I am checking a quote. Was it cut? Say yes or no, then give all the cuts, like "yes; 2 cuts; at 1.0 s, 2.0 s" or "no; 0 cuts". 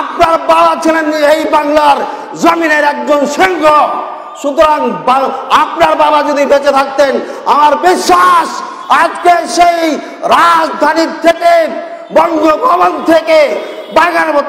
no; 0 cuts